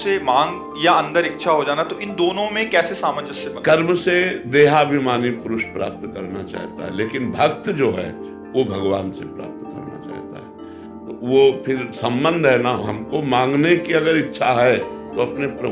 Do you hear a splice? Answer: yes; 1 cut; at 12.8 s

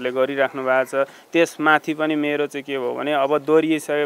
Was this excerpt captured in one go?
yes; 0 cuts

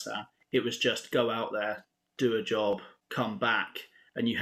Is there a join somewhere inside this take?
yes; 1 cut; at 3.0 s

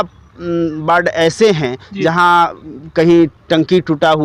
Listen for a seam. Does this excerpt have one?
no; 0 cuts

